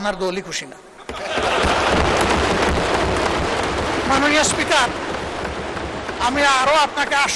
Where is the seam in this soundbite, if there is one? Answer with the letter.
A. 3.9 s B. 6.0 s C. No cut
A